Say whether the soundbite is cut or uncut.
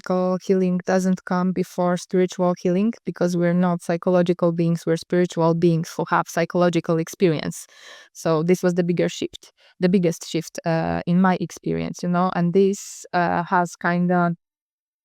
uncut